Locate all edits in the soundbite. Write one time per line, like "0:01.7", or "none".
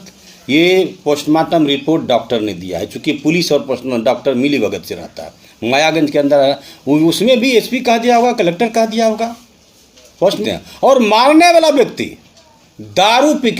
0:10.4